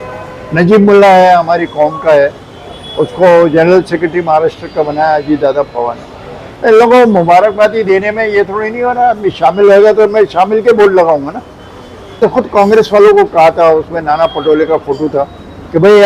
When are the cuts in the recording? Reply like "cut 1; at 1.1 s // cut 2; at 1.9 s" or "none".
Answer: cut 1; at 12.2 s